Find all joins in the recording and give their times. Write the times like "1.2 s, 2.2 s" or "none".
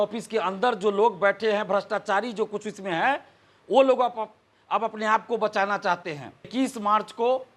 6.5 s